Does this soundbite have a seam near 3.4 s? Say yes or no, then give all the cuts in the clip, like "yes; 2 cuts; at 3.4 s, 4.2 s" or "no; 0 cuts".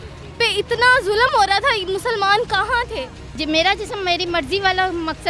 yes; 1 cut; at 3.4 s